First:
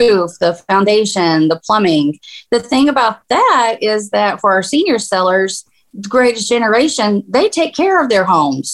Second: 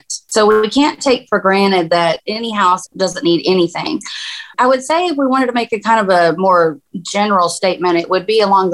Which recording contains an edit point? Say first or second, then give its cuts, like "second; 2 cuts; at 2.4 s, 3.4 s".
second; 1 cut; at 2.3 s